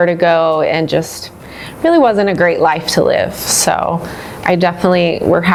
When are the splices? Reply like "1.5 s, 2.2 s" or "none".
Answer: none

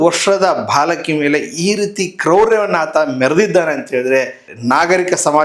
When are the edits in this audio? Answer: 4.5 s

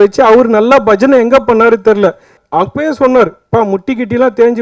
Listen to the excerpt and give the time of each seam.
2.4 s

